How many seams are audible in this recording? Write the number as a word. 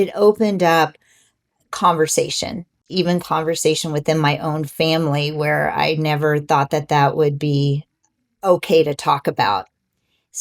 one